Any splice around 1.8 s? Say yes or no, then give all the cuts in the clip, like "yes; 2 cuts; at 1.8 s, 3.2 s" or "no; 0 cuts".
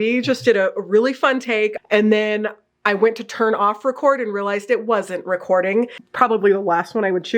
yes; 2 cuts; at 1.8 s, 6.0 s